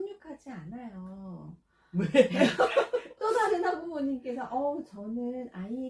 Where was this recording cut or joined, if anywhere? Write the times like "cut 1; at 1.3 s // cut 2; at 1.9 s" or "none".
cut 1; at 3.1 s